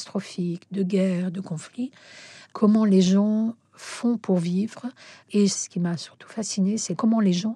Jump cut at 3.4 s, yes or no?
no